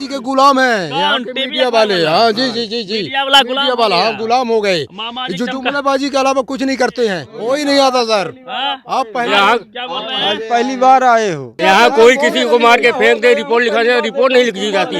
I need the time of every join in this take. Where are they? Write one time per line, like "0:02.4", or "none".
0:07.3
0:11.5